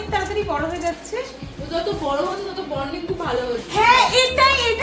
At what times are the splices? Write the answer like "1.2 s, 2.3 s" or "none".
1.5 s